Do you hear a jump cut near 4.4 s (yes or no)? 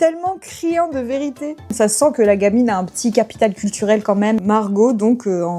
yes